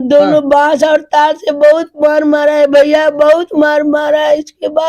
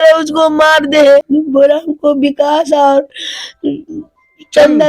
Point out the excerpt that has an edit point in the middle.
second; 1 cut; at 1.3 s

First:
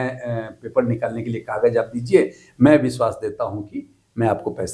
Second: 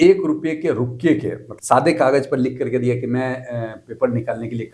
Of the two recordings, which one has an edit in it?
second; 1 cut; at 1.5 s

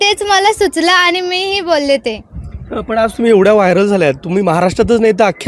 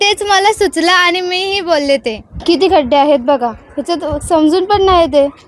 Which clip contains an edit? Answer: second; 1 cut; at 2.3 s

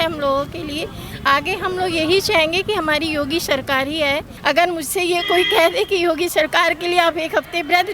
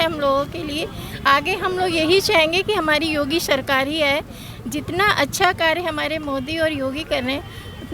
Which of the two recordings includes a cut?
first; 1 cut; at 4.3 s

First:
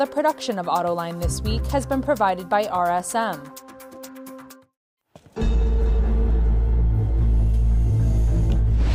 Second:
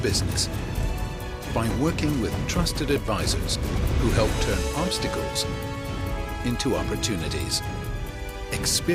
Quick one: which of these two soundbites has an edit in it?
first; 2 cuts; at 3.5 s, 4.5 s

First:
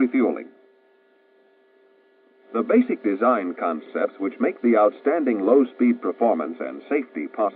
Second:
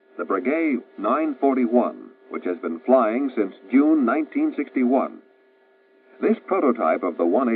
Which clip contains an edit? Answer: first; 1 cut; at 3.3 s

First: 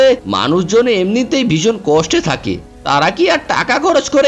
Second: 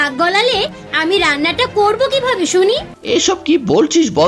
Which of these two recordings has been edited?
second; 1 cut; at 2.9 s

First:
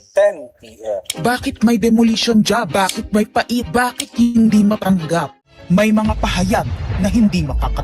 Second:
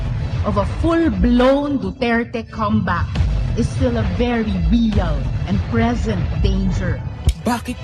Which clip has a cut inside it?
first; 1 cut; at 5.4 s

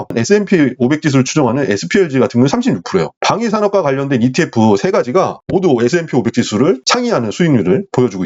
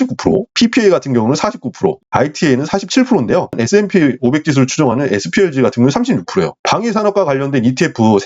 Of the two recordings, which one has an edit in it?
first; 1 cut; at 6.9 s

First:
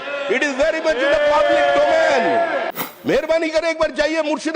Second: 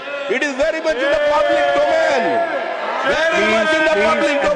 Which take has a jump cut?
first; 1 cut; at 2.7 s

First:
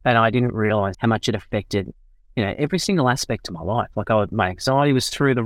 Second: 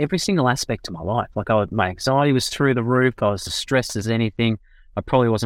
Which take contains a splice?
first; 1 cut; at 1.0 s

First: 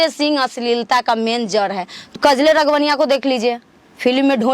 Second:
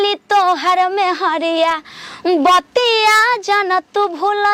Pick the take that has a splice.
first; 1 cut; at 2.1 s

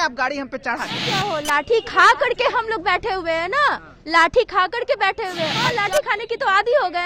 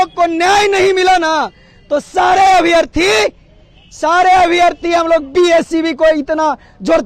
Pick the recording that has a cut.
first; 2 cuts; at 1.1 s, 5.6 s

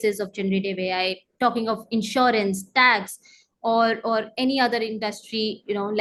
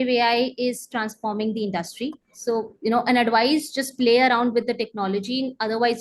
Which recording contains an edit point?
second; 1 cut; at 2.3 s

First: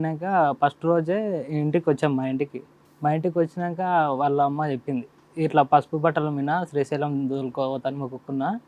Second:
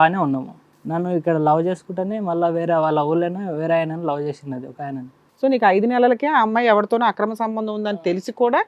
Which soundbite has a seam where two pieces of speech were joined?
second; 1 cut; at 5.2 s

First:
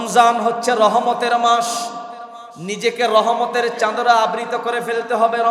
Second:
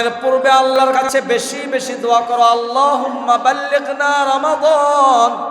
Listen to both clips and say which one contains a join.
second; 1 cut; at 1.0 s

